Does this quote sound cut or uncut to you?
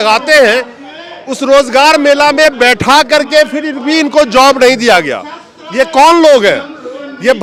uncut